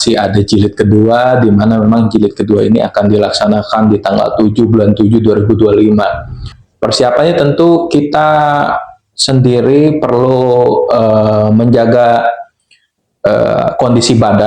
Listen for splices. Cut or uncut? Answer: cut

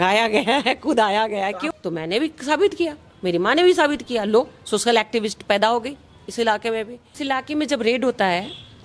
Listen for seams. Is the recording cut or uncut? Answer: cut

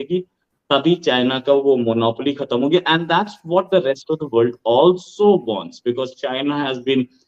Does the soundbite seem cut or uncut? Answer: uncut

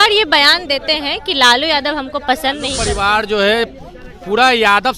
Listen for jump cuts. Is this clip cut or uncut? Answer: cut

